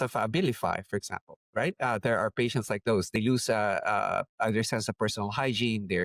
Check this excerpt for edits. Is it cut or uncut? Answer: cut